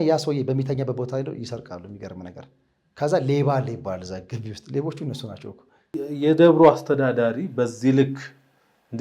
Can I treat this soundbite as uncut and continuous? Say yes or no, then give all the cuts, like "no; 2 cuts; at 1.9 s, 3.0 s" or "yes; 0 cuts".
no; 1 cut; at 5.9 s